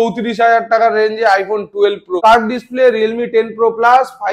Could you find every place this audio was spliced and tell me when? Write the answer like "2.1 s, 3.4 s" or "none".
2.1 s

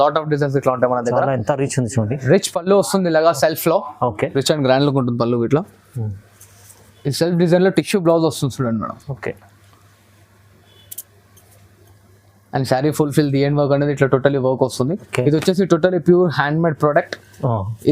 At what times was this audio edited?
4.2 s, 15.0 s

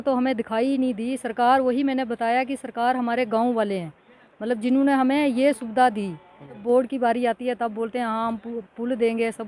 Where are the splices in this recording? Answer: 6.6 s

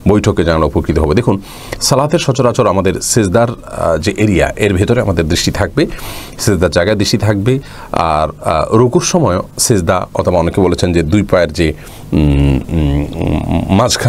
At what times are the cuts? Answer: none

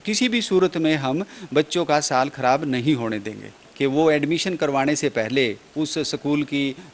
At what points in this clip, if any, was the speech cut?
3.6 s

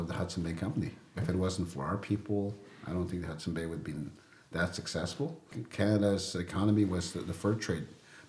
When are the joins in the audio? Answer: 1.2 s, 5.5 s

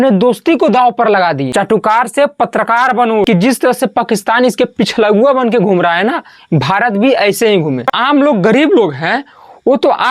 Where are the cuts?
1.4 s, 3.3 s, 7.9 s

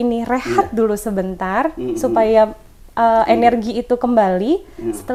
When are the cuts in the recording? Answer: none

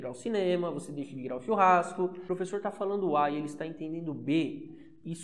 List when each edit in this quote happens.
2.2 s

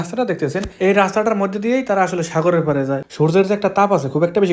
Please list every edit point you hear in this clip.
3.0 s

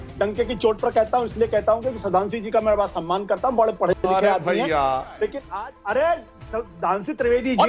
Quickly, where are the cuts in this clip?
5.4 s

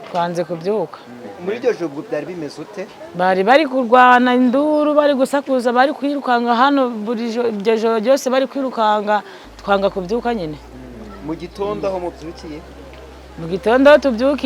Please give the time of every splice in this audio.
none

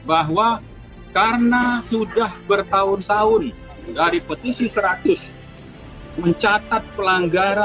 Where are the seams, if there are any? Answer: none

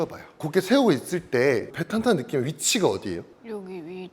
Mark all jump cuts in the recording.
1.7 s

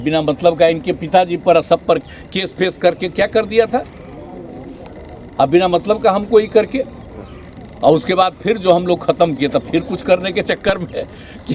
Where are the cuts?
none

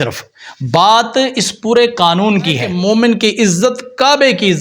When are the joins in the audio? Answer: 2.7 s

